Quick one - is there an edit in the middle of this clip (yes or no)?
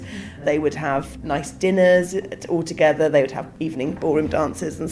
yes